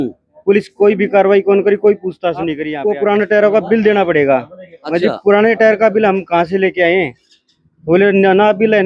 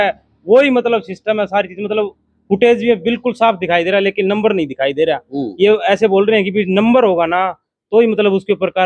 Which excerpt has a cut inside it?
first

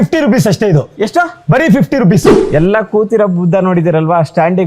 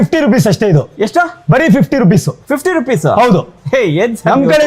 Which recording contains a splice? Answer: first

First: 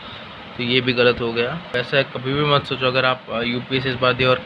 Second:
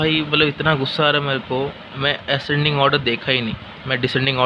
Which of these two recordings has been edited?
first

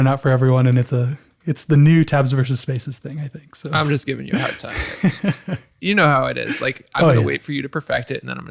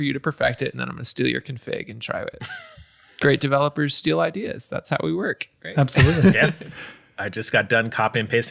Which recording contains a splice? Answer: second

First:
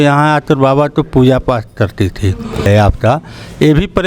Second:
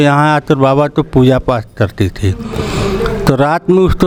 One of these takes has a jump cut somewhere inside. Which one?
first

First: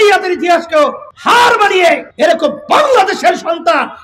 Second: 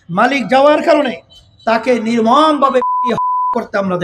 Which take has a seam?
first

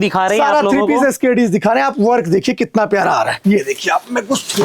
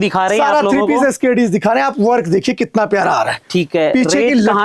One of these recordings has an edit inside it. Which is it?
first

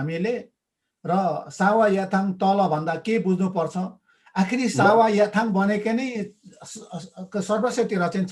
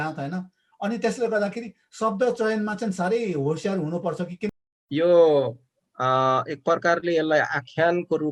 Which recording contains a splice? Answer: second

